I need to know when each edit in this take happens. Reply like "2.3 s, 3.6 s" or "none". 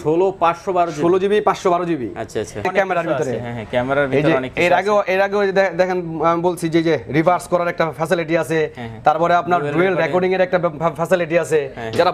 2.7 s